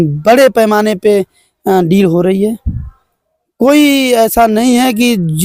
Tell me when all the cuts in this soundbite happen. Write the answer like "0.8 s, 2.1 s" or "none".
none